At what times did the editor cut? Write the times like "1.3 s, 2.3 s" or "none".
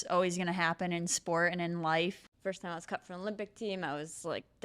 2.3 s